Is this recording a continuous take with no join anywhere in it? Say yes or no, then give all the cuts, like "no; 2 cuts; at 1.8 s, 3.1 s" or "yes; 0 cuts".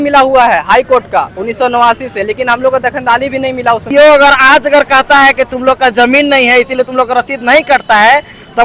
no; 1 cut; at 3.8 s